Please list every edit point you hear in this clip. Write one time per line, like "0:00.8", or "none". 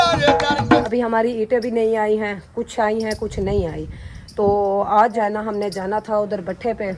0:00.9
0:05.2